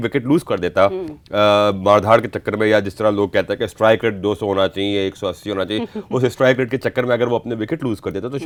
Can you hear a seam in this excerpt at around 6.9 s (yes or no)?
no